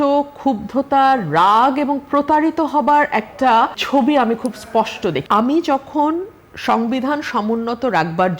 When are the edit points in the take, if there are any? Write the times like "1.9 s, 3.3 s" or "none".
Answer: 3.8 s, 5.2 s